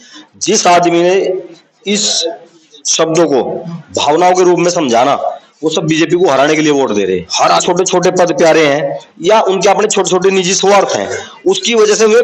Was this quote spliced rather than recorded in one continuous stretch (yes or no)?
yes